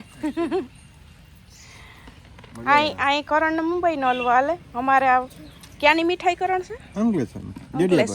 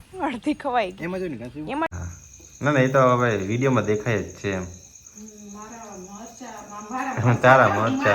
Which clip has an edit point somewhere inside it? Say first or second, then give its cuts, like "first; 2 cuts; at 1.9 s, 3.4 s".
second; 1 cut; at 1.9 s